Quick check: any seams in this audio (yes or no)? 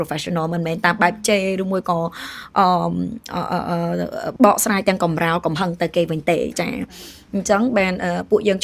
yes